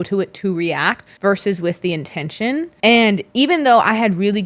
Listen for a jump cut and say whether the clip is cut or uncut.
cut